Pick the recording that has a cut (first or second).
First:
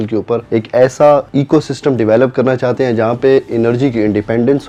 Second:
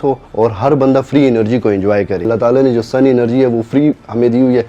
second